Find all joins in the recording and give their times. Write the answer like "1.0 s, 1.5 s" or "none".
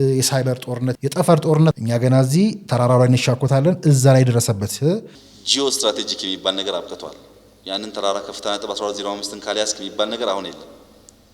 0.9 s, 1.7 s, 5.2 s